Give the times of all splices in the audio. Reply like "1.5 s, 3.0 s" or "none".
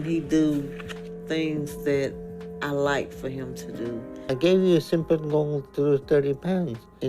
4.3 s